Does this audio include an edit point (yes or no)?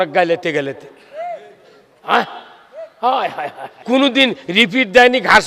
yes